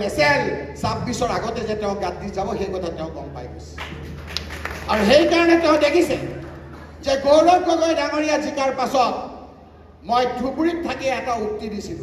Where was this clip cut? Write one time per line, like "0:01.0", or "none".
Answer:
none